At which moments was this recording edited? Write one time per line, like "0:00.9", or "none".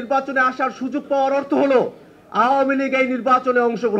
none